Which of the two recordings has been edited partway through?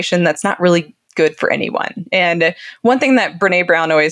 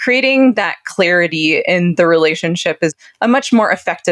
second; 1 cut; at 3.0 s

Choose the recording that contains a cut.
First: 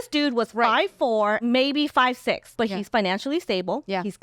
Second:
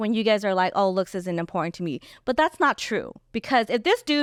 first; 2 cuts; at 1.4 s, 2.5 s

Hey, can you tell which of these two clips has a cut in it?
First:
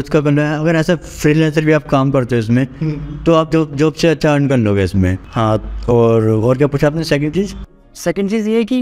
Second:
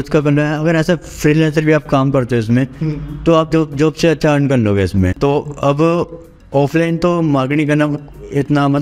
second; 1 cut; at 5.1 s

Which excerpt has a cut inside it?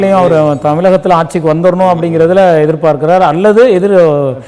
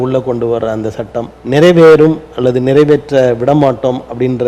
second; 1 cut; at 1.3 s

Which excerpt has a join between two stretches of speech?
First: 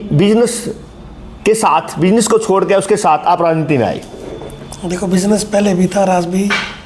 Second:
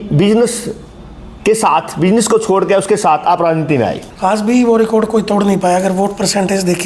second; 1 cut; at 4.1 s

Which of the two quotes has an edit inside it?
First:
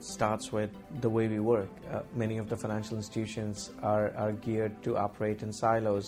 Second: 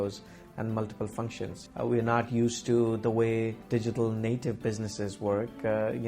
second; 2 cuts; at 1.6 s, 3.6 s

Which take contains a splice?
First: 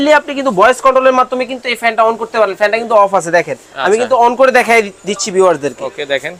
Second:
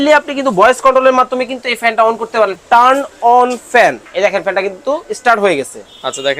second; 2 cuts; at 2.5 s, 4.0 s

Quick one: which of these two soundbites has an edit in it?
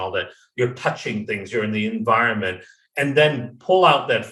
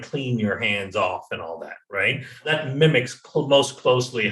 second; 1 cut; at 2.5 s

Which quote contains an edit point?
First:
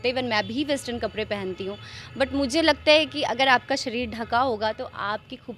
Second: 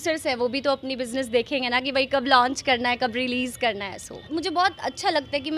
second; 1 cut; at 4.3 s

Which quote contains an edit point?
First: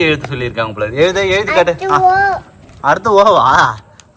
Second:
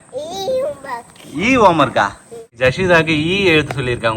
second; 1 cut; at 2.5 s

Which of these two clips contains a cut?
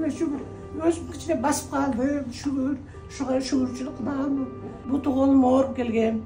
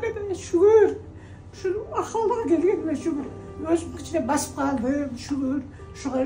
first; 1 cut; at 4.8 s

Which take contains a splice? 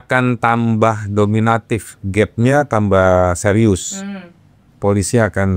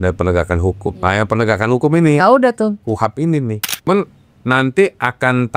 second; 1 cut; at 3.9 s

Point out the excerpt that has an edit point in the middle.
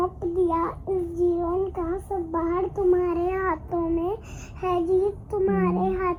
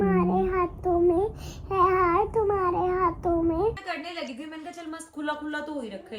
second; 1 cut; at 3.9 s

